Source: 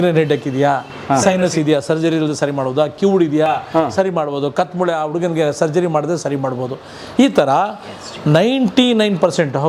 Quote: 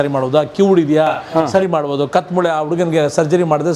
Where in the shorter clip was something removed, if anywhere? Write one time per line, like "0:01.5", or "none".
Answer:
none